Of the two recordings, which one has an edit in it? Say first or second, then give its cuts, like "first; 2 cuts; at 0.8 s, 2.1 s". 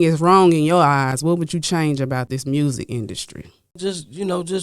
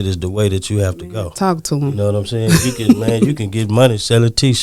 first; 2 cuts; at 2.3 s, 3.8 s